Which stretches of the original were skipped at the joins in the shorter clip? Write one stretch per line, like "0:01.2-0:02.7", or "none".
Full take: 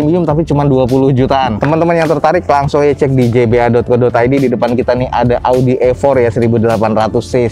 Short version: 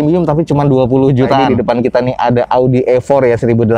0:01.5-0:04.4